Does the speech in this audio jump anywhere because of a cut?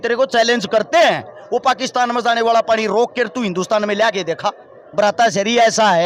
yes; 1 cut; at 4.8 s

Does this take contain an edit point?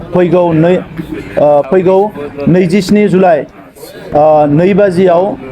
yes; 1 cut; at 3.6 s

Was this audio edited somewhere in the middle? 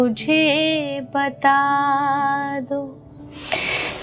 no; 0 cuts

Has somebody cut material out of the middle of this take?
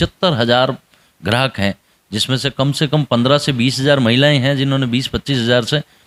no; 0 cuts

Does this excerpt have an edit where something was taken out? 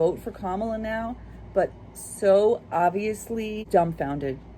yes; 1 cut; at 3.6 s

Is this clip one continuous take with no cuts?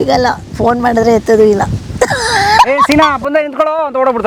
yes; 0 cuts

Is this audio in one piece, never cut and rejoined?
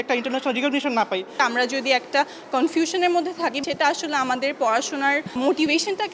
yes; 0 cuts

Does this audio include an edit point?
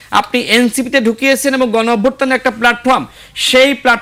no; 0 cuts

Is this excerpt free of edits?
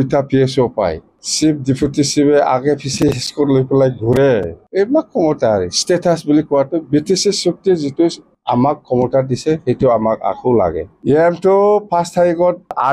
no; 1 cut; at 10.9 s

